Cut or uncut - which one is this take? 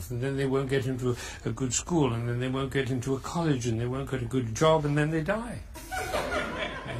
cut